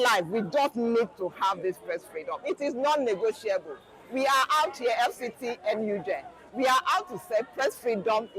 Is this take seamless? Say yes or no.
yes